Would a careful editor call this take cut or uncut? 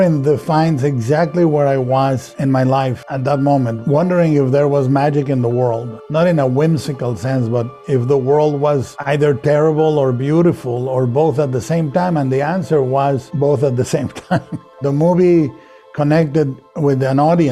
uncut